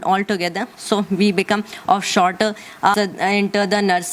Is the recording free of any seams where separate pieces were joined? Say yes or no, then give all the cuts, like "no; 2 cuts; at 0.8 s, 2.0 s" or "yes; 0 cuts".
no; 1 cut; at 2.9 s